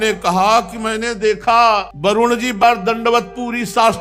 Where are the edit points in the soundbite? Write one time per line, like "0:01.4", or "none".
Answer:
none